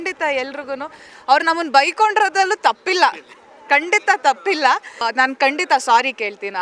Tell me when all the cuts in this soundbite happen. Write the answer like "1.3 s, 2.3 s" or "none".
1.0 s